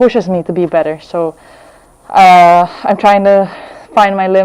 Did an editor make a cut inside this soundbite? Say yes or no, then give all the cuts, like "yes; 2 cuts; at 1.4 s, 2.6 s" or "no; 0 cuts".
no; 0 cuts